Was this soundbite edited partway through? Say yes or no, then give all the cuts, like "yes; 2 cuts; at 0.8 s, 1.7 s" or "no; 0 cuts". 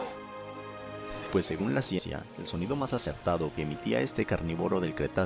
yes; 1 cut; at 2.0 s